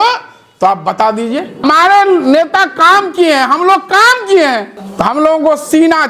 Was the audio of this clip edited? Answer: yes; 2 cuts; at 1.6 s, 4.8 s

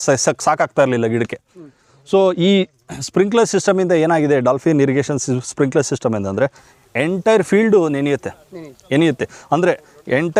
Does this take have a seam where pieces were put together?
no; 0 cuts

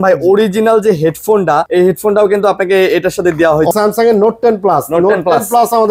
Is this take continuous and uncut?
no; 2 cuts; at 1.7 s, 3.7 s

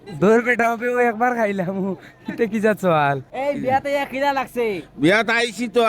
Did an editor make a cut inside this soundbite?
yes; 1 cut; at 3.3 s

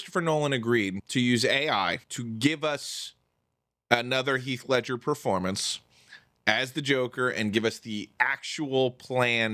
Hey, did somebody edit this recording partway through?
yes; 2 cuts; at 1.0 s, 2.1 s

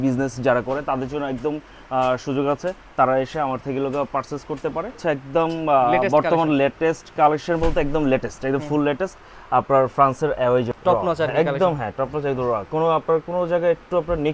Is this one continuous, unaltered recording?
no; 2 cuts; at 4.9 s, 10.7 s

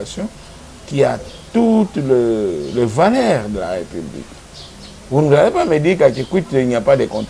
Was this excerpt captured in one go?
yes; 0 cuts

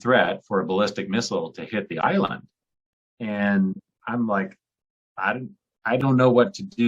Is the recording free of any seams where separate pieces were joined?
no; 1 cut; at 2.8 s

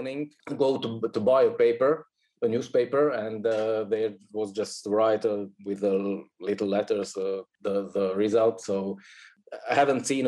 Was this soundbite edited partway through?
yes; 2 cuts; at 7.5 s, 9.3 s

